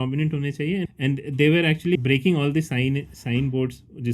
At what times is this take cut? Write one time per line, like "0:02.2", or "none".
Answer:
0:00.9
0:02.0